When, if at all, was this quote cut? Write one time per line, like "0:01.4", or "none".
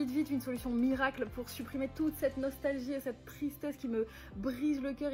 none